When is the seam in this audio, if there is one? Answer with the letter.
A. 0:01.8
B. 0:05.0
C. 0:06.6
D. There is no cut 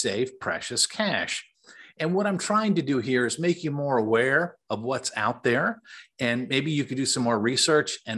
D